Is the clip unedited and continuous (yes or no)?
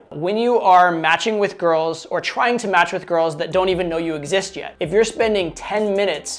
yes